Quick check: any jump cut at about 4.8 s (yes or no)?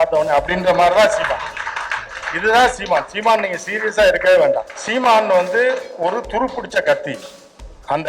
yes